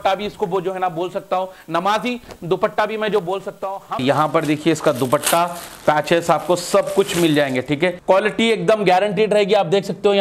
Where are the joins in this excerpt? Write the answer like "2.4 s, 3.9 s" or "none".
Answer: 4.0 s, 8.0 s